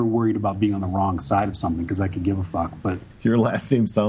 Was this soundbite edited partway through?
yes; 1 cut; at 3.0 s

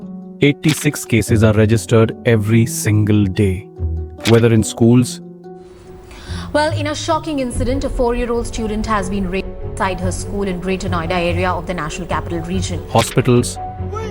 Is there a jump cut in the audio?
no; 0 cuts

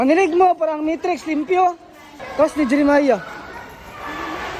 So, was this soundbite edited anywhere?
no; 0 cuts

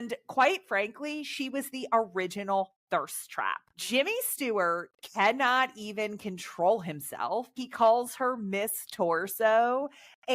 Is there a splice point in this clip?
yes; 1 cut; at 7.6 s

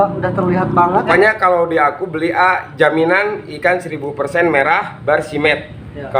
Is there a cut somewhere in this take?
yes; 1 cut; at 1.1 s

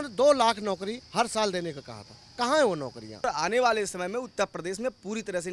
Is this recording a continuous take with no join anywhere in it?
no; 1 cut; at 3.2 s

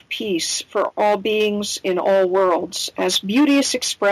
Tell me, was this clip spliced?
yes; 1 cut; at 0.9 s

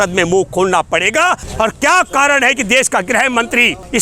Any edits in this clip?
yes; 1 cut; at 1.4 s

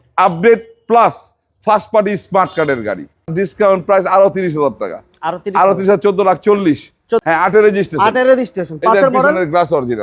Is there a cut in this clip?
yes; 2 cuts; at 3.3 s, 7.2 s

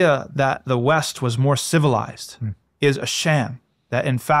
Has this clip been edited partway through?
no; 0 cuts

